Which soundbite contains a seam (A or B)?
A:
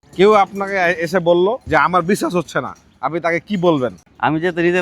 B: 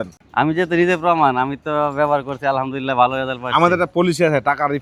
A